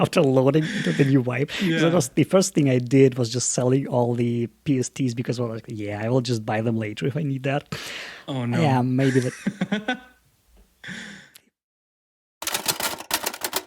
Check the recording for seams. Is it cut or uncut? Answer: cut